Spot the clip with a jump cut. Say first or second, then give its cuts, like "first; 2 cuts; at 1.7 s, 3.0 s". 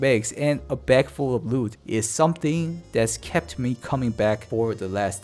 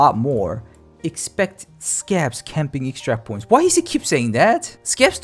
first; 1 cut; at 1.8 s